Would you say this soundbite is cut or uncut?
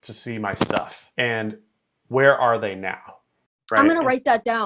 cut